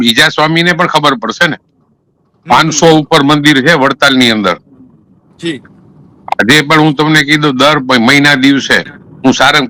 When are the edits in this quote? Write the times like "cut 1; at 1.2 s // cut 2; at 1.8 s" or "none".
none